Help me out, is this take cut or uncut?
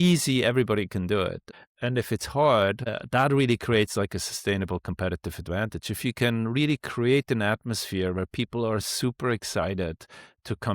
cut